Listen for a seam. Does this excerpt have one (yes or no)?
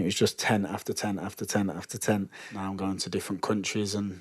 yes